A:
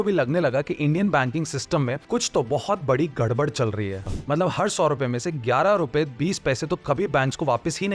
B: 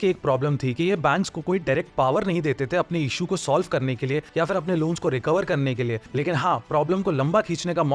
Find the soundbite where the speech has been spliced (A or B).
A